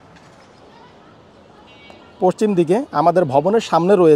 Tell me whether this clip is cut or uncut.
cut